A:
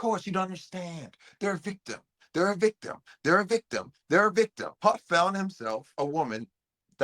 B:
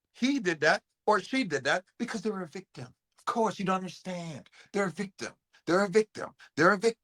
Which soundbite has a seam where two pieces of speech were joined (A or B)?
A